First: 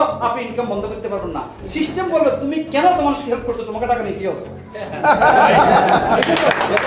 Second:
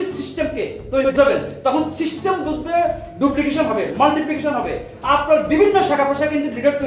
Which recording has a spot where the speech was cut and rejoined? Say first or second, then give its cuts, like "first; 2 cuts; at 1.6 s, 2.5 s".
second; 1 cut; at 1.1 s